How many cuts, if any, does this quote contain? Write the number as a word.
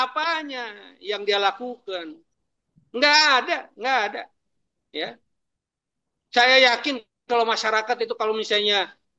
zero